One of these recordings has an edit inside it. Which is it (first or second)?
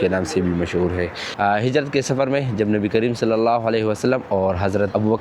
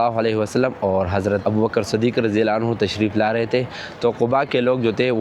first